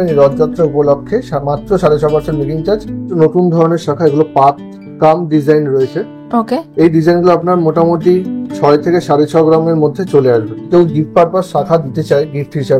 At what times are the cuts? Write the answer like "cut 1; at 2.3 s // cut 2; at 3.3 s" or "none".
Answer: cut 1; at 2.9 s // cut 2; at 10.6 s